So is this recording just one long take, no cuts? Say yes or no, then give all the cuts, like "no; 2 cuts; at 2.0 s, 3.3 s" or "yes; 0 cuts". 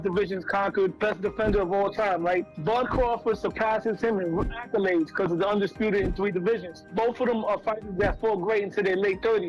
yes; 0 cuts